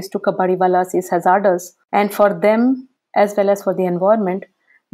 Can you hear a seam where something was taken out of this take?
yes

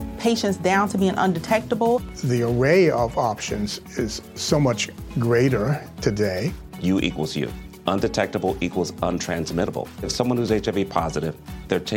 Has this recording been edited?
no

